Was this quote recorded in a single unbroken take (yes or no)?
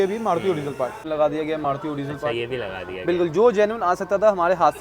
no